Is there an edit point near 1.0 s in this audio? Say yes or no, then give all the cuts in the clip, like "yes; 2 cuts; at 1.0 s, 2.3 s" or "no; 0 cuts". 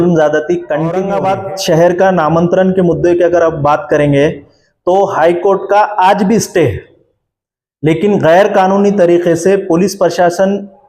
yes; 1 cut; at 1.0 s